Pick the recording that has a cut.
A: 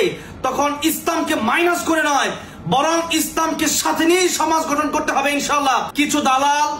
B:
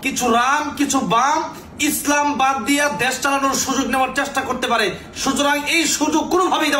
A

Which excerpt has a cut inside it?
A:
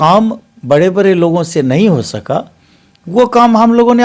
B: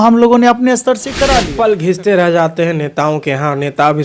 B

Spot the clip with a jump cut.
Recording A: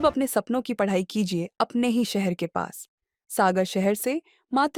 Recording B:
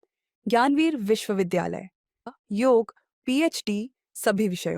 B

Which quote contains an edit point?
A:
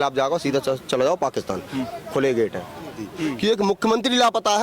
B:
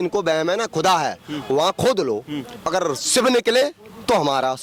A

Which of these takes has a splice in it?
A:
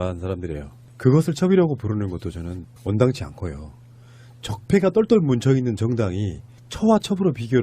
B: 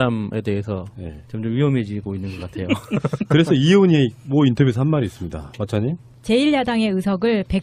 A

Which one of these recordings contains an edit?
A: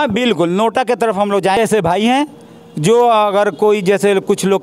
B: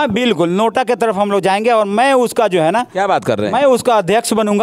A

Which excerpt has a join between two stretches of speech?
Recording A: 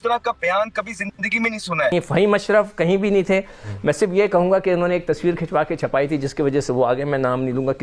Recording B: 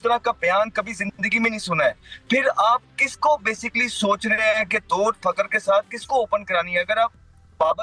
A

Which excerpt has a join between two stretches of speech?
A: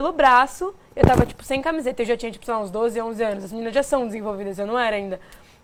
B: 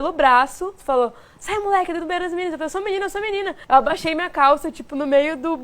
B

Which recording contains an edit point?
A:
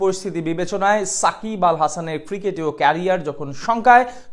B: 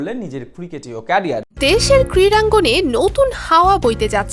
B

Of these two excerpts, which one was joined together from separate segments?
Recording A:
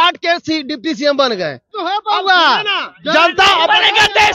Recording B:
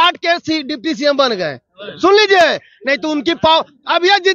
A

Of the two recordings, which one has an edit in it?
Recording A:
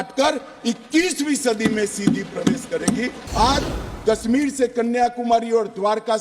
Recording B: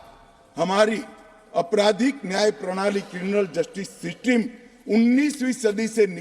A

